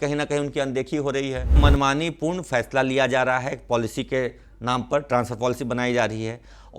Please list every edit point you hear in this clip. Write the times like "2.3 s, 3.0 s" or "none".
1.6 s